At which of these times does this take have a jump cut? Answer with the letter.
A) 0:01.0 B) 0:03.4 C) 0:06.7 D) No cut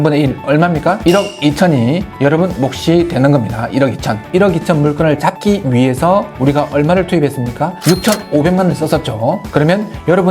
A